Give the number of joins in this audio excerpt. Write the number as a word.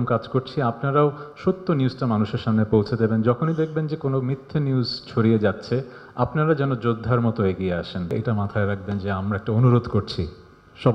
one